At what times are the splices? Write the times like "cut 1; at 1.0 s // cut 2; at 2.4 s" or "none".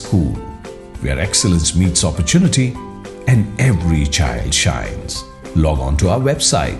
none

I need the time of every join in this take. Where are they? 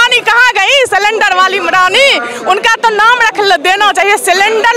none

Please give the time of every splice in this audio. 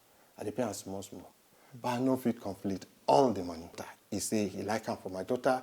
cut 1; at 3.9 s

